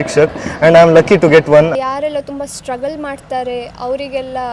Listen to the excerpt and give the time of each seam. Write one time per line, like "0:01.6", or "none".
0:01.7